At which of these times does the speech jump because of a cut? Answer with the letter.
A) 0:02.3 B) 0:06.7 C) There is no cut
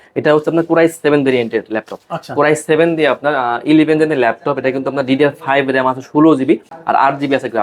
B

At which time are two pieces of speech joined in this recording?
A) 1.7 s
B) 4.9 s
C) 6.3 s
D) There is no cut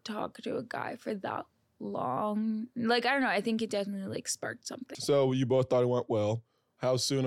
B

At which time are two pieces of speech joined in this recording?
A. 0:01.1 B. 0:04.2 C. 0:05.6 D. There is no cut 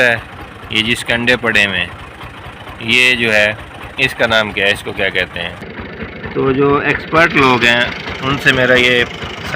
C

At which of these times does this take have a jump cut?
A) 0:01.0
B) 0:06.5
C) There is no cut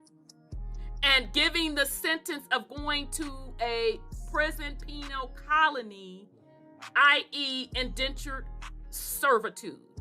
A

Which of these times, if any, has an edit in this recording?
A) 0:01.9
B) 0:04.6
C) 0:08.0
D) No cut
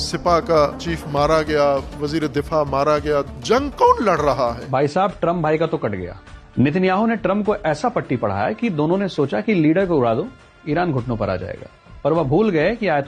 B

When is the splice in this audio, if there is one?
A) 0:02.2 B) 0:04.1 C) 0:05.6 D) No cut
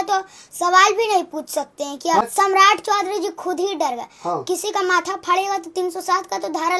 A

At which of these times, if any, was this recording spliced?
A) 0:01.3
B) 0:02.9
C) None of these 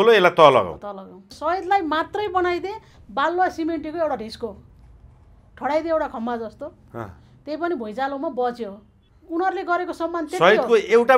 A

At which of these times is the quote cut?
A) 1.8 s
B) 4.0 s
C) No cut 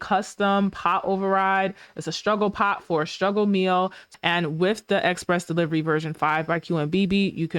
B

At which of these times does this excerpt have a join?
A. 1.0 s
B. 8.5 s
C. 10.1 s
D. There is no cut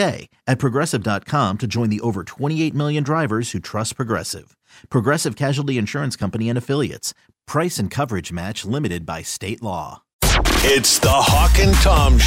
C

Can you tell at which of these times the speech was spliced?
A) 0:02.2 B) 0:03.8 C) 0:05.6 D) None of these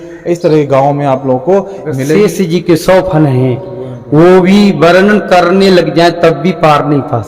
A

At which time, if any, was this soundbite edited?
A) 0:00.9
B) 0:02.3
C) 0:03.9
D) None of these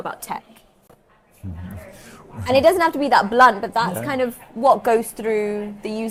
D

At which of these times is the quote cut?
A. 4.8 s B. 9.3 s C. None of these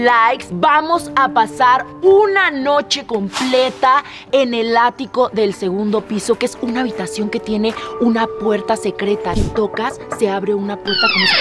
B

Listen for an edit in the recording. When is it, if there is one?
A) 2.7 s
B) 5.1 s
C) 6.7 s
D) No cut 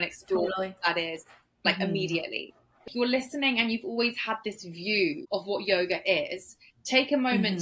A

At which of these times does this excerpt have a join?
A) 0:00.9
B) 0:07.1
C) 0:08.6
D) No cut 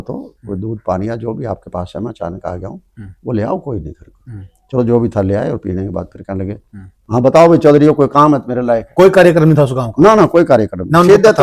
D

